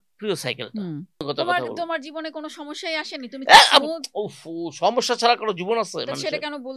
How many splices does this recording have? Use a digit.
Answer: 1